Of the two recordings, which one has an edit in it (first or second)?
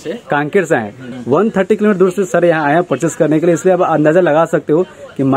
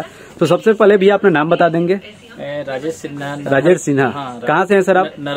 first